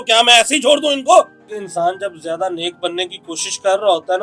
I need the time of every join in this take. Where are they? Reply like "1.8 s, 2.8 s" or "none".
1.4 s